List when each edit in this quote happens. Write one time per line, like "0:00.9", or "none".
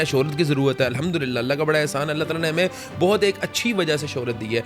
none